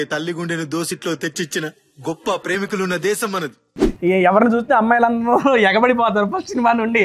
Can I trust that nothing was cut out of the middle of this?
yes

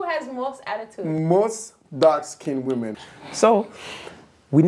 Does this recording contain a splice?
yes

